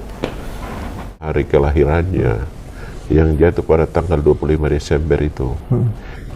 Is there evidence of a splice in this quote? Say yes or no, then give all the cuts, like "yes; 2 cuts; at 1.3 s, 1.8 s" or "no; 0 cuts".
yes; 1 cut; at 1.2 s